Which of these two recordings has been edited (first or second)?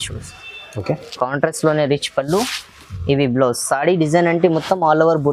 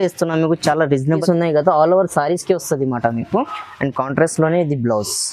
second